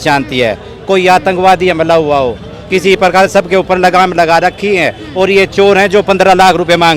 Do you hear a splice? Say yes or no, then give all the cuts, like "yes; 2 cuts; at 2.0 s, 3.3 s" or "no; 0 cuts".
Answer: no; 0 cuts